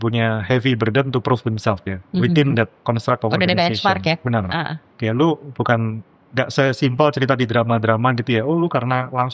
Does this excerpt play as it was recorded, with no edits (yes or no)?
yes